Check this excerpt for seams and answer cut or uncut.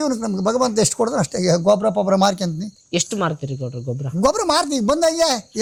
uncut